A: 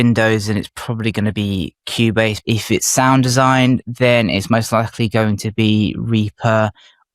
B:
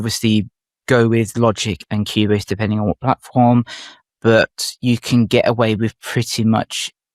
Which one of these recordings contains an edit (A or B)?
A